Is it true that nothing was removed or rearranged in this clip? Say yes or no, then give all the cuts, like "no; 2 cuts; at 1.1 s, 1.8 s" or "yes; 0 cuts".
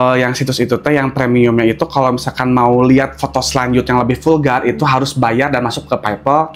yes; 0 cuts